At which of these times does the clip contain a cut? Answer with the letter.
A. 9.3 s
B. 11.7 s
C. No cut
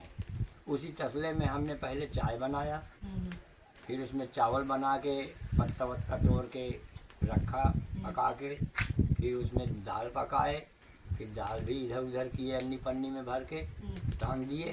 C